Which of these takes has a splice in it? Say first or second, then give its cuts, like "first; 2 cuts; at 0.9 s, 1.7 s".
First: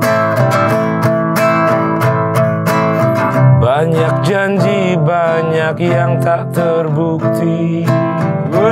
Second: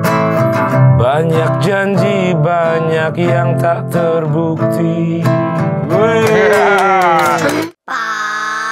second; 1 cut; at 7.7 s